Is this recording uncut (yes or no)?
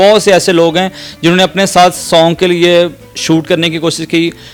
yes